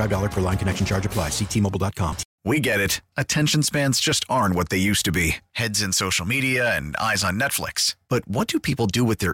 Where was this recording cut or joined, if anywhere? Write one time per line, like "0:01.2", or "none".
0:02.3